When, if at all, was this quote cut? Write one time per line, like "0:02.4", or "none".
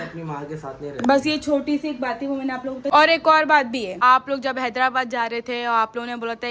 0:02.8
0:03.9

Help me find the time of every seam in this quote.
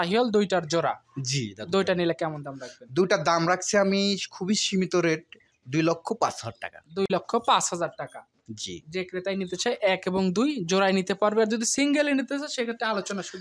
none

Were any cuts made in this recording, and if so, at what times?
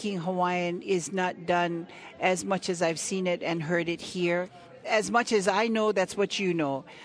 0:04.9

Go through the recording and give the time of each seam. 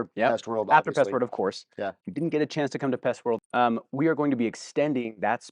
0:02.0
0:03.4

